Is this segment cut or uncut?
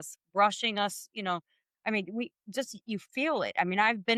uncut